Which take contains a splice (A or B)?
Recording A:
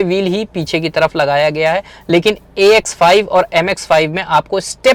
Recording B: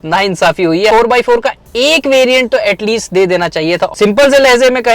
B